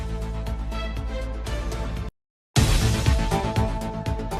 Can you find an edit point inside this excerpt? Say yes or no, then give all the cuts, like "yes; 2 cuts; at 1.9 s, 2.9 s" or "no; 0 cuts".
yes; 1 cut; at 1.9 s